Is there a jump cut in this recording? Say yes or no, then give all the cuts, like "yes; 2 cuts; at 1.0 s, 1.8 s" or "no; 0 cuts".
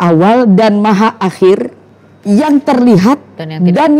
no; 0 cuts